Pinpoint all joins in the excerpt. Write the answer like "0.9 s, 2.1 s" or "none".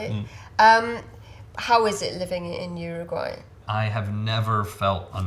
3.6 s